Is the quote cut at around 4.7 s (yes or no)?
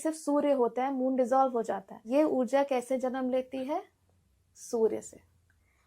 no